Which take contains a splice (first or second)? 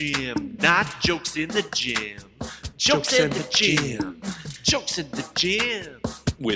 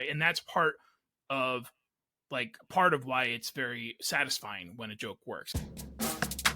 second